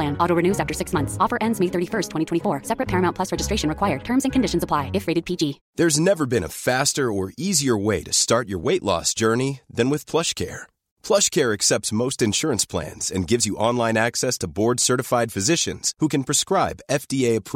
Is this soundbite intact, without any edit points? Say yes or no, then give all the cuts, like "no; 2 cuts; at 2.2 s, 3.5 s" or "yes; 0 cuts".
no; 1 cut; at 5.6 s